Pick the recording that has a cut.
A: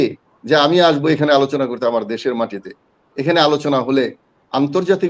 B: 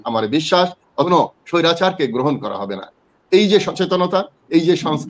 B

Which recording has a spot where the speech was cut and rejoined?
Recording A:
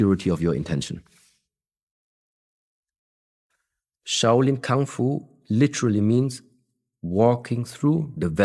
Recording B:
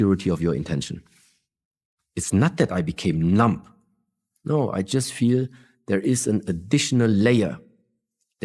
B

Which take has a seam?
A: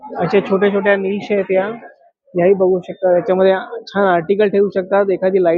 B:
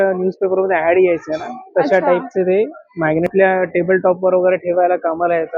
B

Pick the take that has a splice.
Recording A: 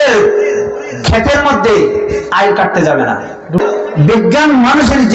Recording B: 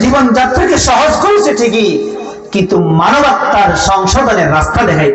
A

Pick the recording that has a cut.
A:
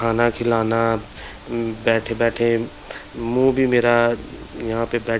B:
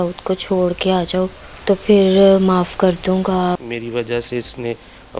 B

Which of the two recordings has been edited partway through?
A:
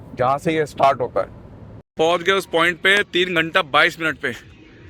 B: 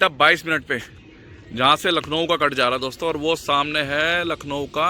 A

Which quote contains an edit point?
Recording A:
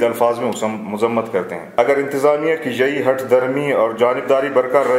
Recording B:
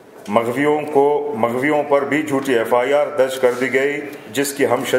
A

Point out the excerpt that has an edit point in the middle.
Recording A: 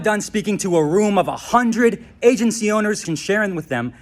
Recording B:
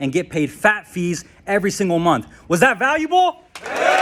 A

